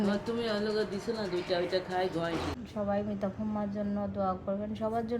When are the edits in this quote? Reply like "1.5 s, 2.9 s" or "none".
2.6 s